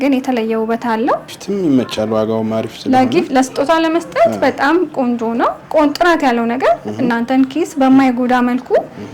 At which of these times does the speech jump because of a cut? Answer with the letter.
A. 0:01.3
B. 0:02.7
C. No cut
A